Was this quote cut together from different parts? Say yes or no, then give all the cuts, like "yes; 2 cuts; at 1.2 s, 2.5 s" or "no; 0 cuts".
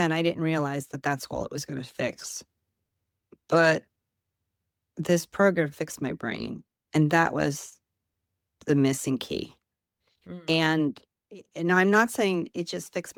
no; 0 cuts